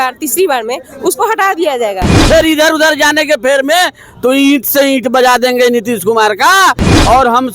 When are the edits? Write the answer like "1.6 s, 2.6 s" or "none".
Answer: 2.1 s